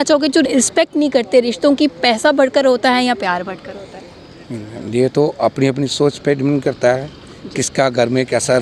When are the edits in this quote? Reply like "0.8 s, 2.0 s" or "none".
none